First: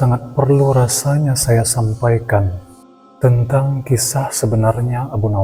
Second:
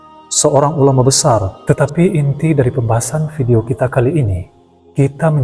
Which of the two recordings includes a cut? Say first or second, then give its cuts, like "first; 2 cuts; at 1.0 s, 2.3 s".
second; 1 cut; at 1.5 s